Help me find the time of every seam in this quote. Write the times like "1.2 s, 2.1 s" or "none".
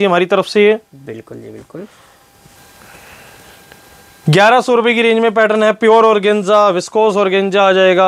2.5 s